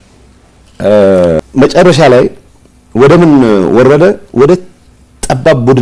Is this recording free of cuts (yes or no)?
no